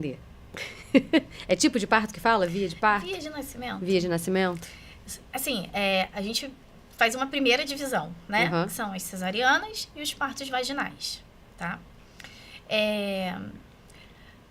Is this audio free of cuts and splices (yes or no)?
yes